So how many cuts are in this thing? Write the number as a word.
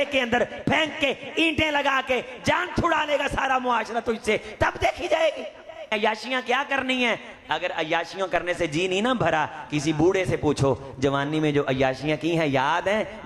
one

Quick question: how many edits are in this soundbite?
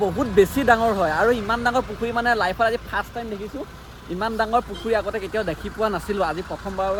zero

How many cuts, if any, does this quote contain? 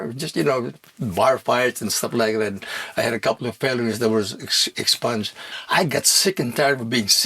one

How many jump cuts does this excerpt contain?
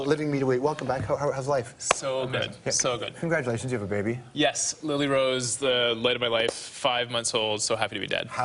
one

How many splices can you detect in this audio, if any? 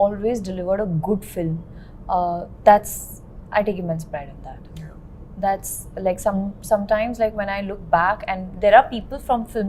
zero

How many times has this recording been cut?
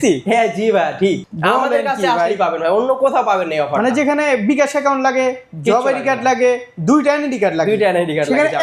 one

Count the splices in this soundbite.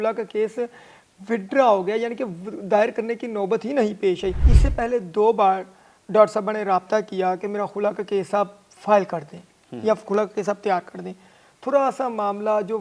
one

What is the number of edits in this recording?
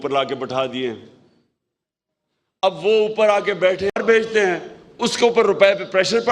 one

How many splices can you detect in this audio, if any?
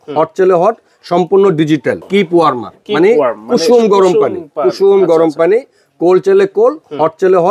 one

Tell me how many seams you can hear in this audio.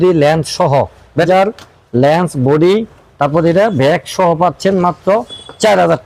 one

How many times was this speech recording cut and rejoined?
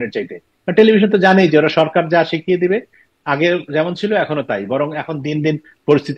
zero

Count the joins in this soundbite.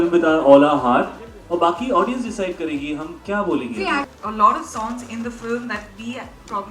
one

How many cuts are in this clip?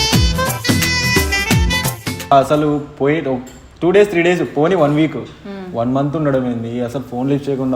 one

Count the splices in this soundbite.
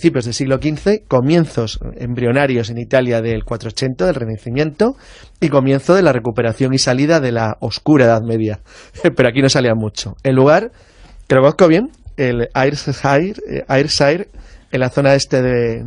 zero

